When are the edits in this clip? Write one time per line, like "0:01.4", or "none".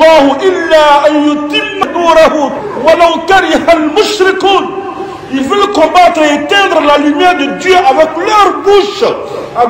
0:01.8
0:02.6

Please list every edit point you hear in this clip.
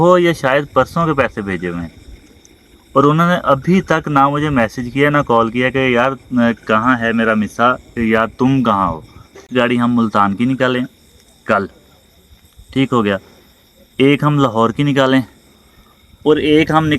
0:09.5

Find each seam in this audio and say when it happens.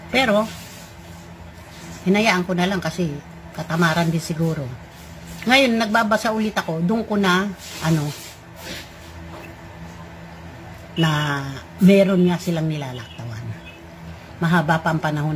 0:14.1

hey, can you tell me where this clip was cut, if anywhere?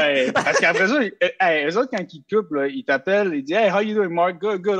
none

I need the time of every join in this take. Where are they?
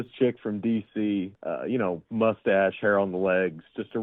0:01.3

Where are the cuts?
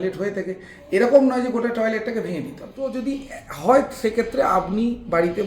0:02.9

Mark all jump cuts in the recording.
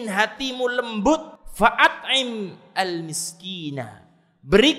0:01.4

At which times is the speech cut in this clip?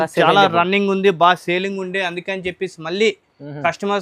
none

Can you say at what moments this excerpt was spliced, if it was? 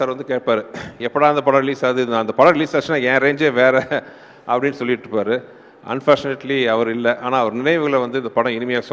none

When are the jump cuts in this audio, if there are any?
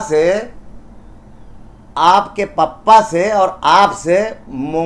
none

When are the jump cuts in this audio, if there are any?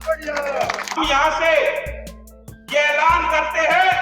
0:01.0

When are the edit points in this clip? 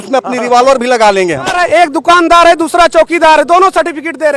0:01.5

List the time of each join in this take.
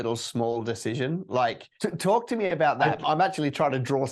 0:01.7
0:03.0

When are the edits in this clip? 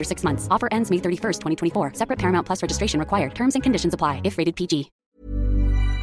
0:05.0

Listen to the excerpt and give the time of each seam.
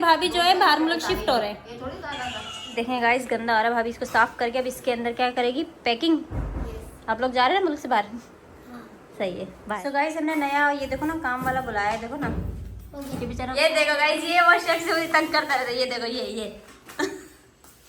0:02.7
0:09.8
0:13.5

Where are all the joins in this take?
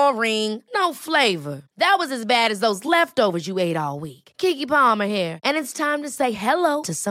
none

